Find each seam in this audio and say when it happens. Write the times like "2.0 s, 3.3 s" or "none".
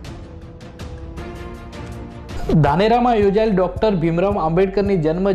2.3 s